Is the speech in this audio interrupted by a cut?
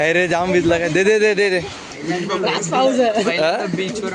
yes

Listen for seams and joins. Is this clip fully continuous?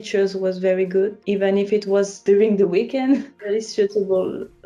no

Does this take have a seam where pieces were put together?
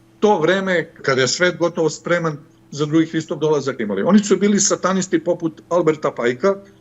yes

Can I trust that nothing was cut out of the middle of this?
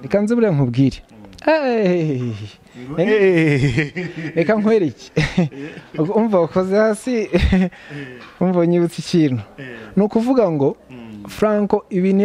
yes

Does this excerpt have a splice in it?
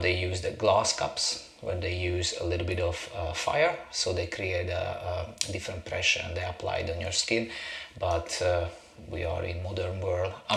no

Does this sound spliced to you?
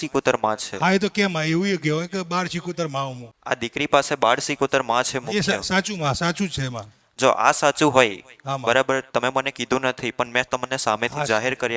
yes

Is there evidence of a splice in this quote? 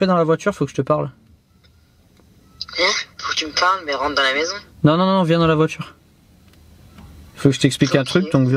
no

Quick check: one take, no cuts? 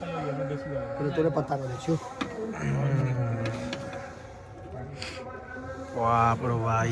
yes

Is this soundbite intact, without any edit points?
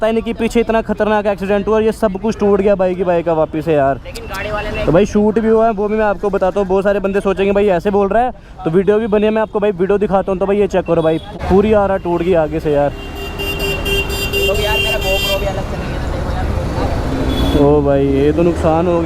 yes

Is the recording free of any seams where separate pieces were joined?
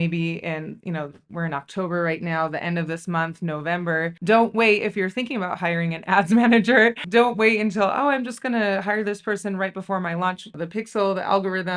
no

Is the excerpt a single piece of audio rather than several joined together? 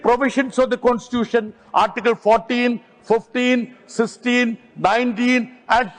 yes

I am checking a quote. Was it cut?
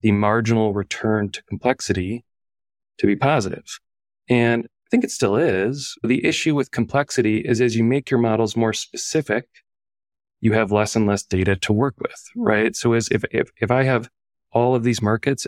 no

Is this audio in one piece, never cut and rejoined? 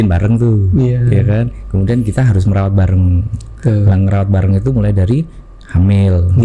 yes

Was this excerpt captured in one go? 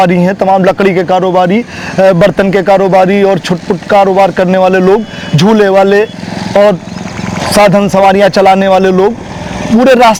yes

